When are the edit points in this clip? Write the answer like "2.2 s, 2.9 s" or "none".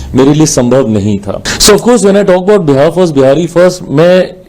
1.5 s